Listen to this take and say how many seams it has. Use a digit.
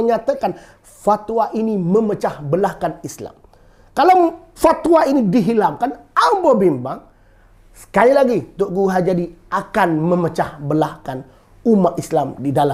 0